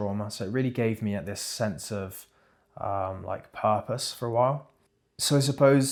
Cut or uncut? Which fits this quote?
uncut